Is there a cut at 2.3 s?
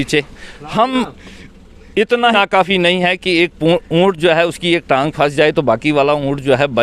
yes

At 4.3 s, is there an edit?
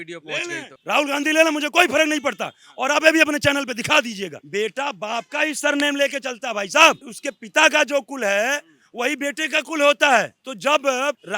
yes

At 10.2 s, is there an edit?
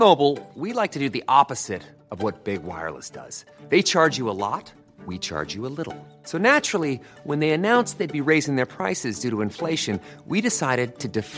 no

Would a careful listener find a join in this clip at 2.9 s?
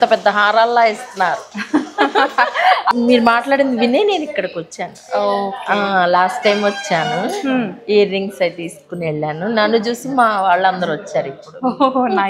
yes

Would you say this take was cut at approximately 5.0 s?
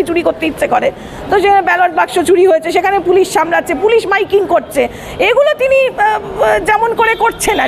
no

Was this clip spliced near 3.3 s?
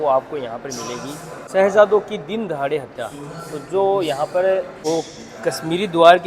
no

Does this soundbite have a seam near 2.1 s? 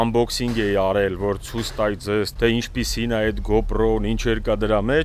no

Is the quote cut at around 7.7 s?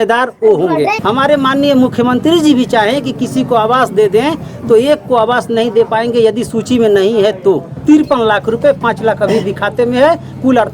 yes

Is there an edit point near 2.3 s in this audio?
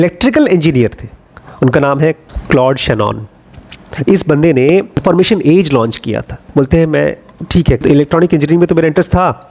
yes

